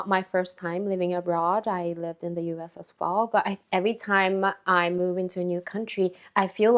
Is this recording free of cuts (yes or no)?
yes